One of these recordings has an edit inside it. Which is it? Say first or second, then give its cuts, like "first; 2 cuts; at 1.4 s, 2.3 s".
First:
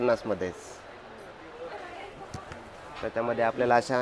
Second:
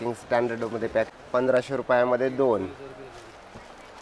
second; 1 cut; at 1.1 s